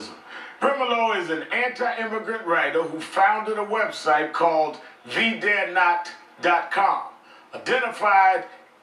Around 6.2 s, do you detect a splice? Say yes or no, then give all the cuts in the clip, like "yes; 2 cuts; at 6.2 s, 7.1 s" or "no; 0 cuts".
yes; 1 cut; at 6.2 s